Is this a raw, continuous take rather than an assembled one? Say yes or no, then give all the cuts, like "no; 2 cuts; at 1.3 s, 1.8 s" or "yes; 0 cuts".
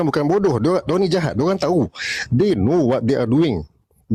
yes; 0 cuts